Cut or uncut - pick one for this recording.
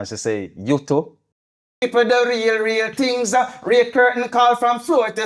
cut